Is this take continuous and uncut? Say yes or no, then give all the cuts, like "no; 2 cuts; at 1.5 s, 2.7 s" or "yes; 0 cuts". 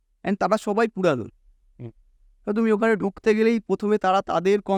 yes; 0 cuts